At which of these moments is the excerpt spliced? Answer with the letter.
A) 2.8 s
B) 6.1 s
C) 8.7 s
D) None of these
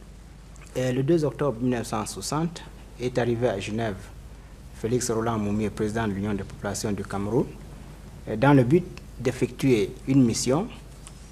C